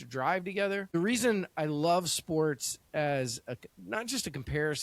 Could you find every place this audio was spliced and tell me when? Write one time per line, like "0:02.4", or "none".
0:00.9